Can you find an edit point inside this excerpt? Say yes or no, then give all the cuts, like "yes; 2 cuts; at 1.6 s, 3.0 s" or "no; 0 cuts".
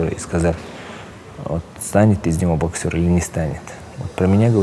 no; 0 cuts